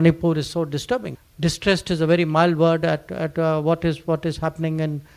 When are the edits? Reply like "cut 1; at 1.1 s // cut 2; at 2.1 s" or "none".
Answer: cut 1; at 1.2 s